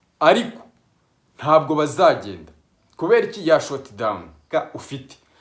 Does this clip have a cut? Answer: yes; 1 cut; at 4.5 s

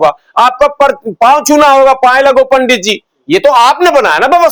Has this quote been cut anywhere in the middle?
no; 0 cuts

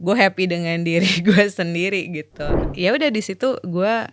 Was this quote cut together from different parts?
yes; 1 cut; at 2.6 s

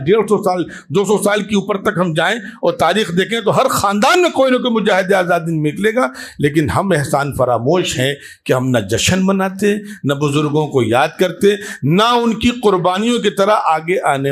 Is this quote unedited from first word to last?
yes; 0 cuts

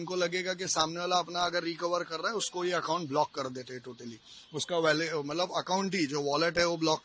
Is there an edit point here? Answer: no; 0 cuts

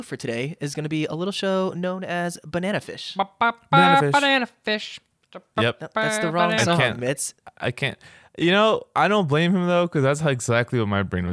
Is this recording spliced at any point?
no; 0 cuts

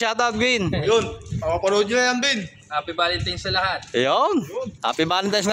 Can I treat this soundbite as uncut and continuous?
yes; 0 cuts

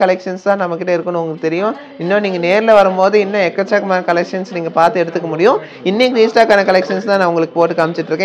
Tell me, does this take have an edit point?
no; 0 cuts

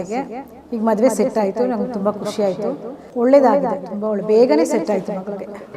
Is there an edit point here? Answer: yes; 1 cut; at 3.0 s

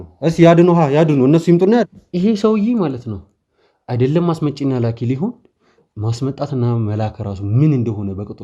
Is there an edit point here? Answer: yes; 1 cut; at 1.8 s

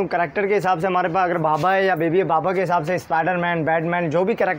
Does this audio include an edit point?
no; 0 cuts

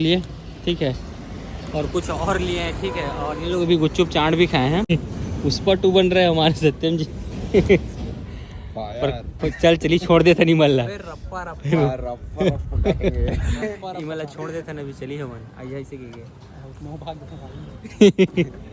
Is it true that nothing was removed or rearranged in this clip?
yes; 0 cuts

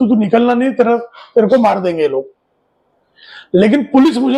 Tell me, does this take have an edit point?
no; 0 cuts

